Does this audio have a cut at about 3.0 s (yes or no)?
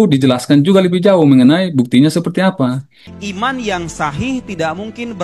yes